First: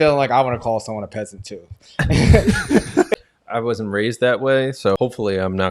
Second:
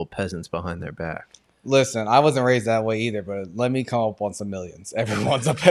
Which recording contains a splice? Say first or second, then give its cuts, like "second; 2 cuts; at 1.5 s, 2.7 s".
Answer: first; 2 cuts; at 3.1 s, 5.0 s